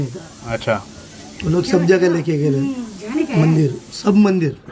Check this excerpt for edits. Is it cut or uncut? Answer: uncut